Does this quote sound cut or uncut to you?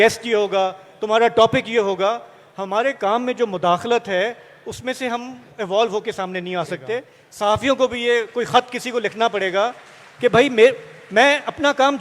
cut